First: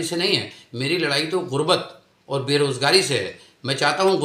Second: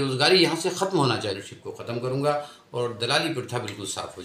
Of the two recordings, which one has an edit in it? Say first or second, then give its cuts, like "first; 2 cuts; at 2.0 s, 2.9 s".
second; 1 cut; at 1.4 s